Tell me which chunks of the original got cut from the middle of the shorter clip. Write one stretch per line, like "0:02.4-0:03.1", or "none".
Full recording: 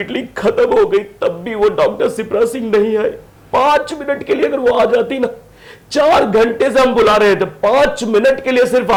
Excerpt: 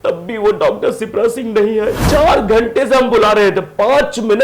0:03.2-0:05.9